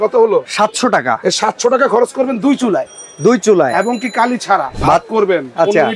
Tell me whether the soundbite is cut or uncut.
cut